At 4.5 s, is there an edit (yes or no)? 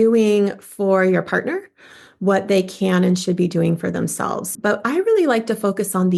yes